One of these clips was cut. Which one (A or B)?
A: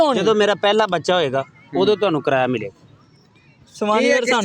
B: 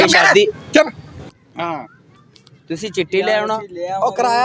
B